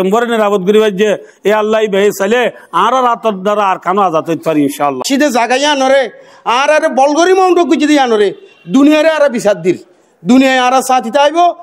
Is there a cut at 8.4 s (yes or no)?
no